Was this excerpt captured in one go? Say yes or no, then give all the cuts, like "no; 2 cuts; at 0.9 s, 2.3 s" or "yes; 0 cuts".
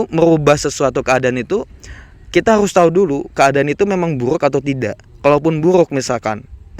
yes; 0 cuts